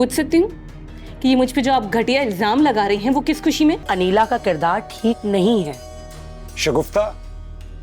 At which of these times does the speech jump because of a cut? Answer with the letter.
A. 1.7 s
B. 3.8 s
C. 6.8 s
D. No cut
B